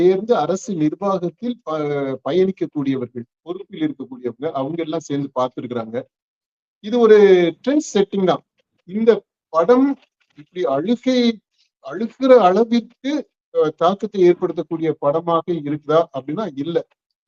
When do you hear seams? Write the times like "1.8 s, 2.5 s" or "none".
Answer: 8.8 s